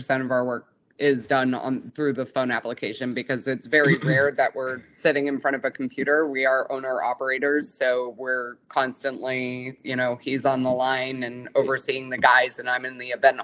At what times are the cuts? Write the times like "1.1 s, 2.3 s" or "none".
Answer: none